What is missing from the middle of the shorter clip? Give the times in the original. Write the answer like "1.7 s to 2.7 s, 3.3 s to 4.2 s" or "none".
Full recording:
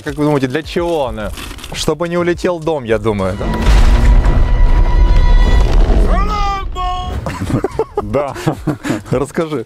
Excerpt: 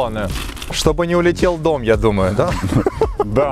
3.5 s to 7.2 s